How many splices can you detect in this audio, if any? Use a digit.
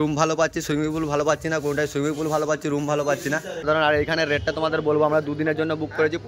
0